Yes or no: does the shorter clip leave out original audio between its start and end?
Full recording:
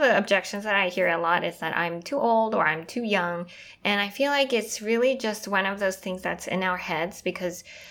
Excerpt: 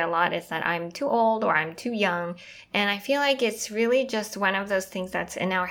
no